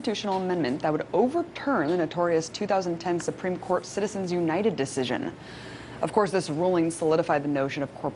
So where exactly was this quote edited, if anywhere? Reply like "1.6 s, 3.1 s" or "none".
1.8 s